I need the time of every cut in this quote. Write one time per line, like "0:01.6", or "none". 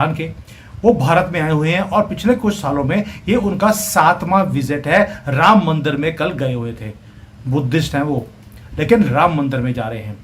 none